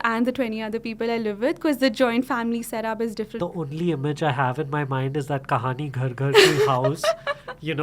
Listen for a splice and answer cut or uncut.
cut